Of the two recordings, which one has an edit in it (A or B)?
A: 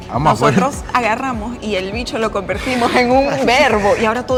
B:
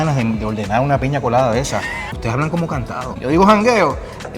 B